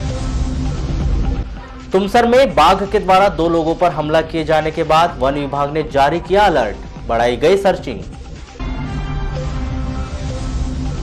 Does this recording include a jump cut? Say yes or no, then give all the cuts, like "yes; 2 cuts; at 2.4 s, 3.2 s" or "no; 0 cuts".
yes; 1 cut; at 1.3 s